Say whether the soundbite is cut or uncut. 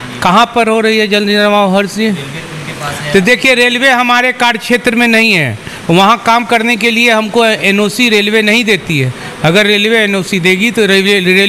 uncut